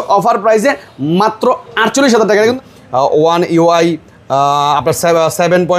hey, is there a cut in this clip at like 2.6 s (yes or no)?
yes